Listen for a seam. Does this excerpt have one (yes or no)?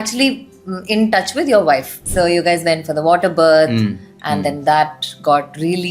yes